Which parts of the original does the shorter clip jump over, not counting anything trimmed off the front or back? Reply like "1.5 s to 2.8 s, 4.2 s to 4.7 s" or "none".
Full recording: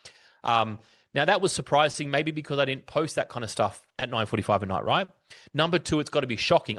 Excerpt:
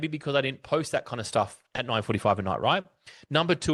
none